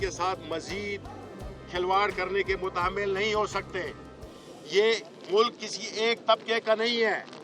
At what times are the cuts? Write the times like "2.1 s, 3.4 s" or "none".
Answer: none